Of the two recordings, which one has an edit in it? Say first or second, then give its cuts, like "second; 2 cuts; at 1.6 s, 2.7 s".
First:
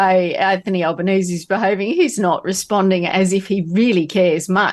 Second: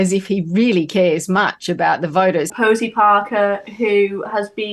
second; 1 cut; at 2.5 s